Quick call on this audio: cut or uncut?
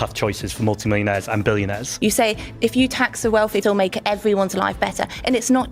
cut